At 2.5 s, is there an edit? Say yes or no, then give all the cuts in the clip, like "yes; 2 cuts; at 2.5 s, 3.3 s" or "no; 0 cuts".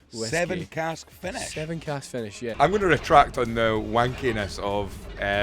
yes; 1 cut; at 2.5 s